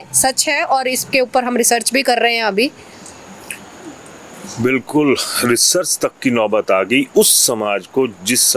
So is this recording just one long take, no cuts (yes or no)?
yes